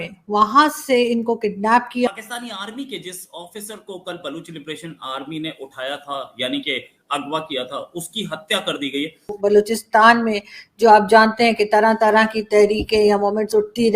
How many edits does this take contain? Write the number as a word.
two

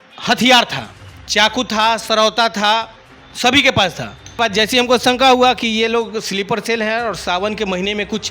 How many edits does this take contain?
one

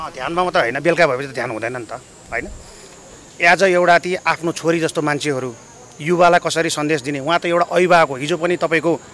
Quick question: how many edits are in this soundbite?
zero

